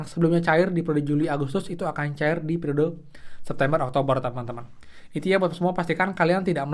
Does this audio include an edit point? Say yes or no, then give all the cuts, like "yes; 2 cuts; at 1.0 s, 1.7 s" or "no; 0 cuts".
no; 0 cuts